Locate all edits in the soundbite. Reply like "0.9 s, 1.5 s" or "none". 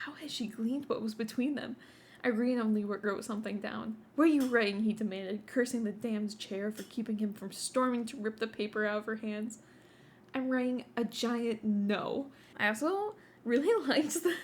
12.4 s